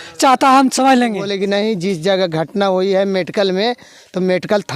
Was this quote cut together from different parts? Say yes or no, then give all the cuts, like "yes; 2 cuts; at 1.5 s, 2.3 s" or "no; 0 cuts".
yes; 1 cut; at 1.3 s